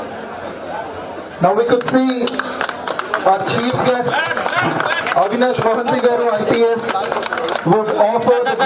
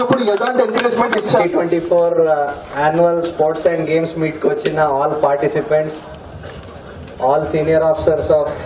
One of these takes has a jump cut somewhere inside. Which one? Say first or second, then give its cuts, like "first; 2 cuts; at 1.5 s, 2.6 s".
second; 1 cut; at 1.4 s